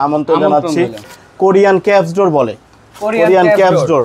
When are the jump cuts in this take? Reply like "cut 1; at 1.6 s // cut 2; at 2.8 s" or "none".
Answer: cut 1; at 1.2 s